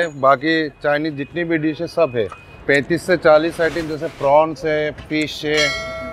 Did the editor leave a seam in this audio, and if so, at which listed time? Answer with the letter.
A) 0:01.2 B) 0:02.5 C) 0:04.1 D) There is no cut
B